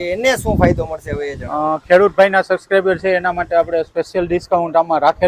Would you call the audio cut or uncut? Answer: uncut